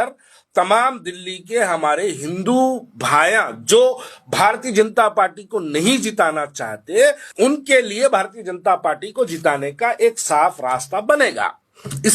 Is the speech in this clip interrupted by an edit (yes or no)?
yes